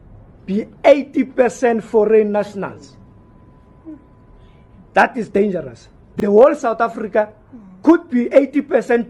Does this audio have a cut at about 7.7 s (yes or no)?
no